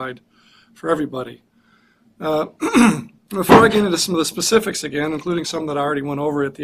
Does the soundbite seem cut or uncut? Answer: uncut